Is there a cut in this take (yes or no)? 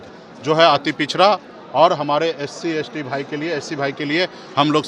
no